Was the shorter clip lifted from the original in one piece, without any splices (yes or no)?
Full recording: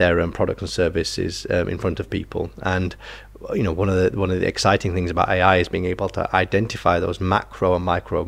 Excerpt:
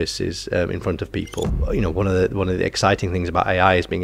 no